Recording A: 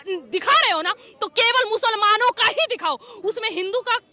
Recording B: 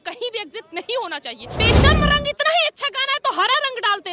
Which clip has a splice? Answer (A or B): B